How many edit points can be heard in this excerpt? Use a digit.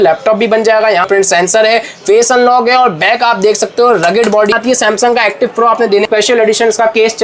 3